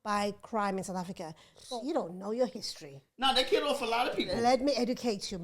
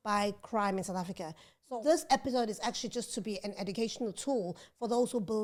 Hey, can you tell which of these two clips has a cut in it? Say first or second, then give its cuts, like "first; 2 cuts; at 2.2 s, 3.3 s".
first; 1 cut; at 1.8 s